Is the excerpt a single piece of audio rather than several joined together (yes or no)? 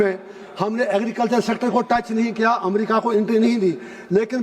yes